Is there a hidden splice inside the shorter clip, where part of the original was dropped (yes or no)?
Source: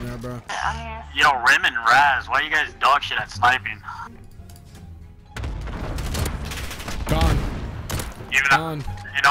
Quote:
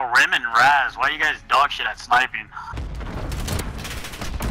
yes